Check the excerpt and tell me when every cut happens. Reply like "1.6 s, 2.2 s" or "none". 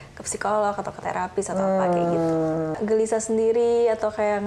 2.7 s